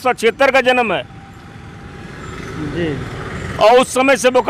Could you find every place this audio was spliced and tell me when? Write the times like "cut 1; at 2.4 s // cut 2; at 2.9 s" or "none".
none

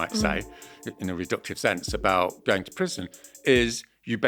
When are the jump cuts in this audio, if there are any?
none

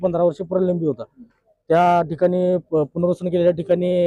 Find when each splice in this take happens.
none

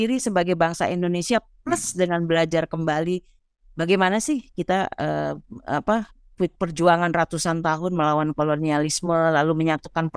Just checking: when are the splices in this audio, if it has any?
none

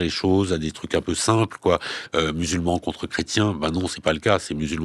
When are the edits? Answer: none

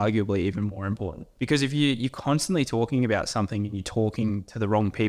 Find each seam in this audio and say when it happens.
cut 1; at 1.2 s

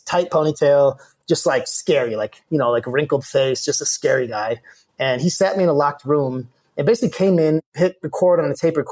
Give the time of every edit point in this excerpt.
cut 1; at 7.6 s

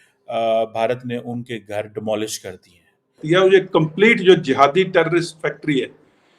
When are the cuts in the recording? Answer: cut 1; at 3.4 s

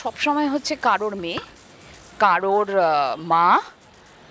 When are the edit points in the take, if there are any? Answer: none

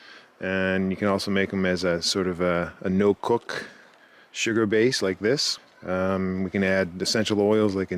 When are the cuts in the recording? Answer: none

